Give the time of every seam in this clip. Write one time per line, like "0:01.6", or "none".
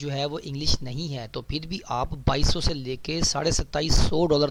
none